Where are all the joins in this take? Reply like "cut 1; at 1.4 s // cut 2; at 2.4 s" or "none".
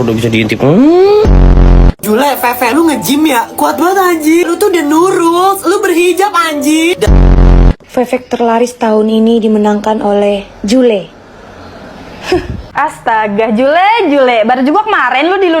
cut 1; at 12.6 s